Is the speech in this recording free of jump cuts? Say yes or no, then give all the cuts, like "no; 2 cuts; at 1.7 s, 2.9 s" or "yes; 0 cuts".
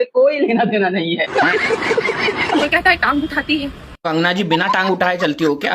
no; 1 cut; at 2.6 s